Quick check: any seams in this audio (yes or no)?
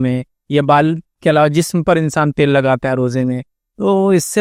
no